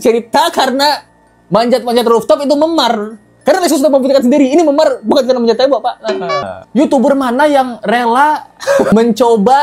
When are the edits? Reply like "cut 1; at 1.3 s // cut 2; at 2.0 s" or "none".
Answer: cut 1; at 6.6 s // cut 2; at 8.9 s

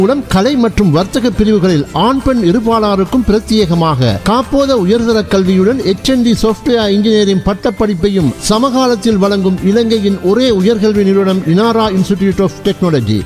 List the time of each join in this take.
none

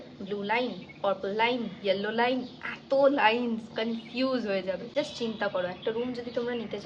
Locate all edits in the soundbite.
cut 1; at 4.8 s

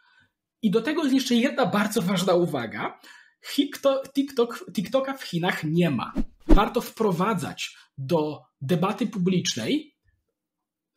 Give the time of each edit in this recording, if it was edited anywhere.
cut 1; at 6.4 s

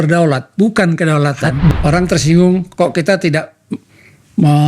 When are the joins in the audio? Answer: cut 1; at 1.8 s

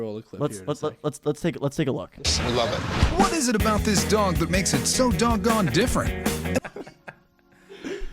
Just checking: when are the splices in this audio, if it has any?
cut 1; at 2.2 s // cut 2; at 6.6 s

